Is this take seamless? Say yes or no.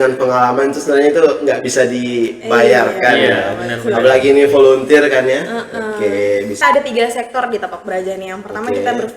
no